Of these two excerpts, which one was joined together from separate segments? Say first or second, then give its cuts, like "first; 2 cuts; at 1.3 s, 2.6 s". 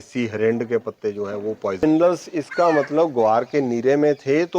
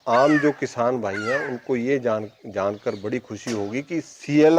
first; 1 cut; at 1.8 s